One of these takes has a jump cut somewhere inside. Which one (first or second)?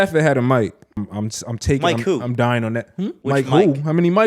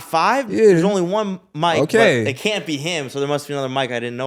first